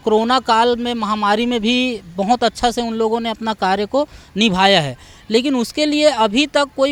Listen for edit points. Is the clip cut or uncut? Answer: uncut